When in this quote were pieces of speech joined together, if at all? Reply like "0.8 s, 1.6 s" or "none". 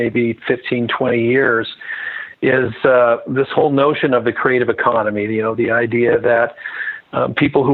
none